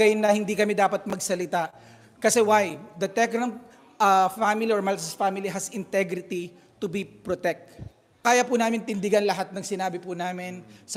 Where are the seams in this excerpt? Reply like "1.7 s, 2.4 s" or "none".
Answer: 8.2 s